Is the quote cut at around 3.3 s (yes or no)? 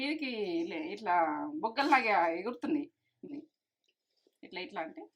yes